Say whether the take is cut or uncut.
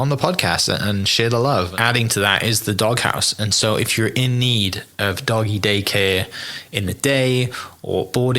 cut